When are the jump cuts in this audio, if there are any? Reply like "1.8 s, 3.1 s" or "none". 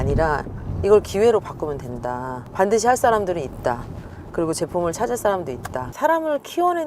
5.9 s